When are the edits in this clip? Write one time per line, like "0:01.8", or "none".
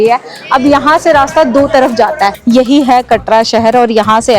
0:02.4